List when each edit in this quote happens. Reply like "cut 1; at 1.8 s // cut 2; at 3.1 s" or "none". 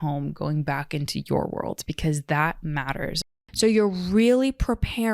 cut 1; at 3.2 s